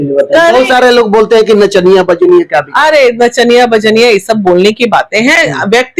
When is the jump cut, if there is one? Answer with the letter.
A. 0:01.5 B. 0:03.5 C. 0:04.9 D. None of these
D